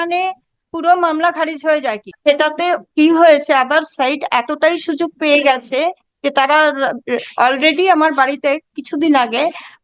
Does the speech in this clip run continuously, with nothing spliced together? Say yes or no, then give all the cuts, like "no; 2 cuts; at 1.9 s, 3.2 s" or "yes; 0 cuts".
no; 1 cut; at 2.0 s